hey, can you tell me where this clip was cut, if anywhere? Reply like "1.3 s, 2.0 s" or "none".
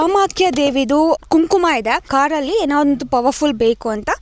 1.2 s, 2.1 s